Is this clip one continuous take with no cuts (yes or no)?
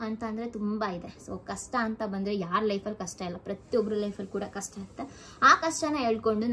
yes